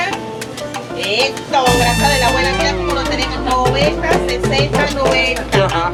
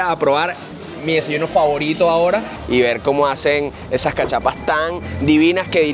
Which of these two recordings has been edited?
second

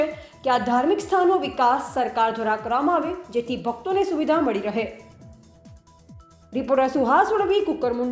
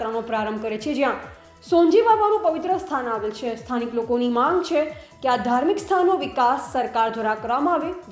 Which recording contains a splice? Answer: first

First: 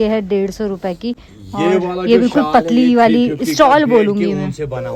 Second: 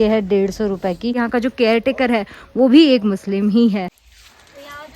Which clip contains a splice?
second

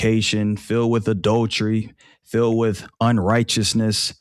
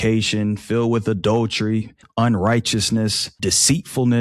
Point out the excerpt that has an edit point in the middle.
second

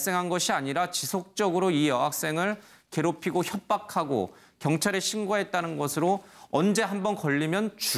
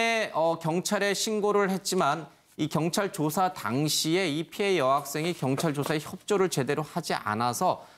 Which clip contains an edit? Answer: second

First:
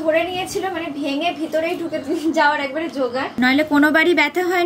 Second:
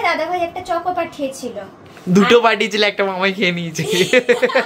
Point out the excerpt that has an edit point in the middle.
first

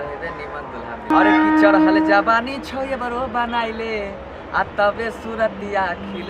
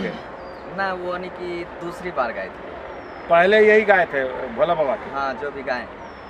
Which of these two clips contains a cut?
first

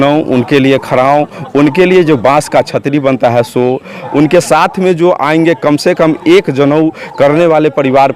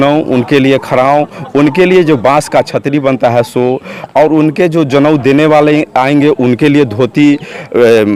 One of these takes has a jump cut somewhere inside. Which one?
first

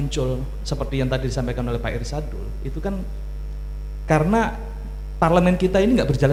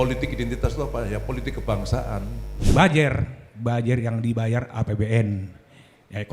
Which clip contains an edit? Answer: second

